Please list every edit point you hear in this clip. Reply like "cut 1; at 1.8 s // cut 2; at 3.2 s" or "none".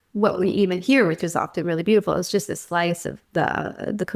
cut 1; at 3.2 s